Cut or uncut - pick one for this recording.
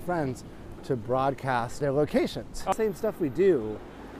cut